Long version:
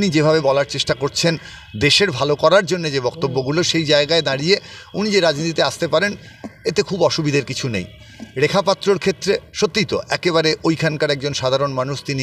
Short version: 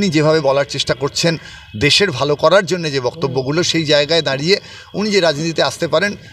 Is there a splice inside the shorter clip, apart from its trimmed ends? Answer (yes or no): no